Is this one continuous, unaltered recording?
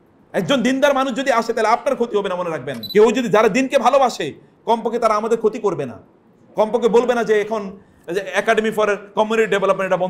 no; 1 cut; at 2.7 s

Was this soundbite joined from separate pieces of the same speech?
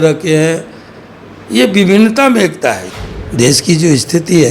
yes; 1 cut; at 2.9 s

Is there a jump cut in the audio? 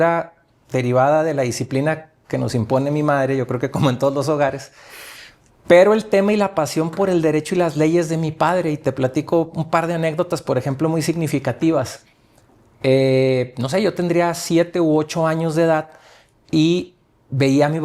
no; 0 cuts

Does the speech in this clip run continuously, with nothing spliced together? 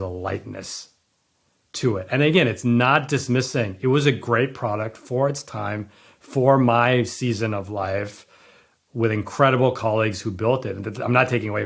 yes; 0 cuts

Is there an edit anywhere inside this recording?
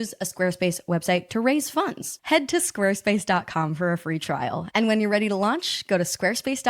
yes; 1 cut; at 2.1 s

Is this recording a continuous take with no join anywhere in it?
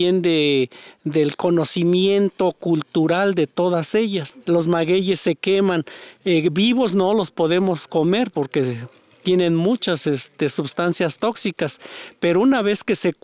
no; 1 cut; at 4.3 s

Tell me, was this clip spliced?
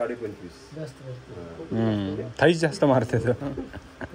no; 0 cuts

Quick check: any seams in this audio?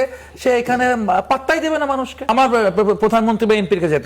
yes; 1 cut; at 2.3 s

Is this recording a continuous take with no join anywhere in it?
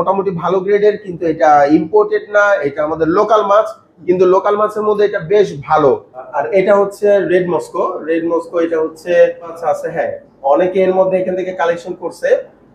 no; 2 cuts; at 6.3 s, 9.6 s

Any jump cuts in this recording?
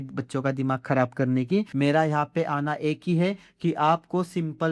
yes; 1 cut; at 1.7 s

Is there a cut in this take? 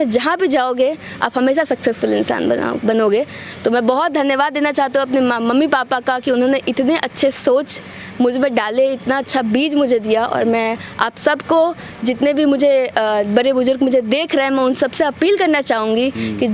no; 0 cuts

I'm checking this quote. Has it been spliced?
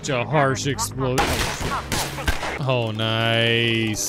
yes; 1 cut; at 2.6 s

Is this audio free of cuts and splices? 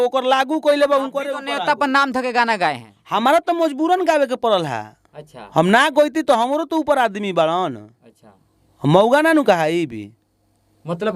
yes; 0 cuts

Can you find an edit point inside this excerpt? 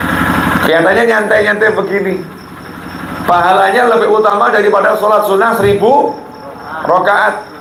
no; 0 cuts

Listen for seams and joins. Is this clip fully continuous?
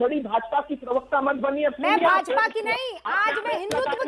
yes; 0 cuts

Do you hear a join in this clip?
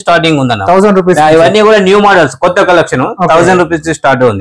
no; 0 cuts

